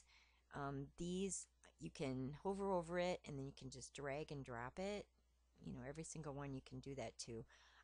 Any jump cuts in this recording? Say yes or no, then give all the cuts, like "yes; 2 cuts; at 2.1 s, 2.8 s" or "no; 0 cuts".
no; 0 cuts